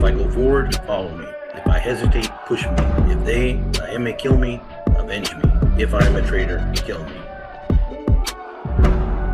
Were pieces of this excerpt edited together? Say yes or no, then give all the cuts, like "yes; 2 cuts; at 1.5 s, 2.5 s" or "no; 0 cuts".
yes; 1 cut; at 7.3 s